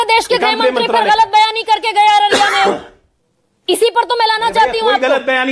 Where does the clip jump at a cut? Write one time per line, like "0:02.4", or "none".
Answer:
none